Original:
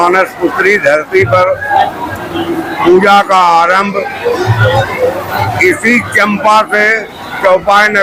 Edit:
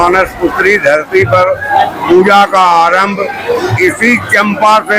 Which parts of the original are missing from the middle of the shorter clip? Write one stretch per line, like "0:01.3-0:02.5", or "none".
0:02.0-0:02.7
0:04.5-0:05.6